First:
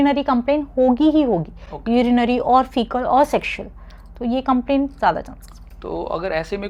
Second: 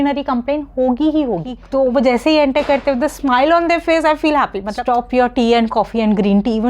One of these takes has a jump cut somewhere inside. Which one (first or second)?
second